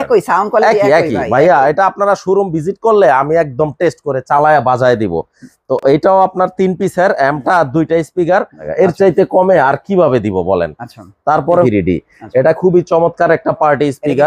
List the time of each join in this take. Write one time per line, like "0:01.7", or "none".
0:08.6
0:11.6